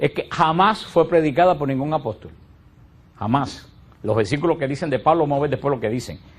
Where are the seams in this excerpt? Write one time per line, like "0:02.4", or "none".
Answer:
0:03.2